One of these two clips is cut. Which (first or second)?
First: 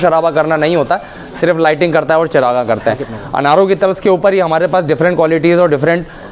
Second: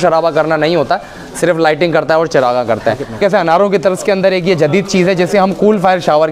second